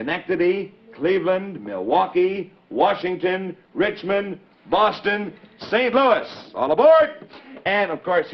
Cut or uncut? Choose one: uncut